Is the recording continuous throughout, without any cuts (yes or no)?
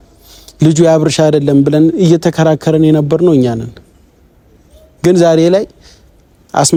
yes